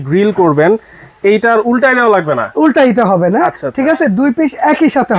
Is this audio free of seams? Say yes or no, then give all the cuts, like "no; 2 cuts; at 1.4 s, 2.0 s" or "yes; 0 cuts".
yes; 0 cuts